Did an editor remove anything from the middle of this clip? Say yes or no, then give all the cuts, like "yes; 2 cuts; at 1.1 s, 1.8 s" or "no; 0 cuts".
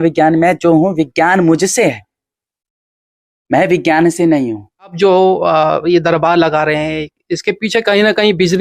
yes; 1 cut; at 4.9 s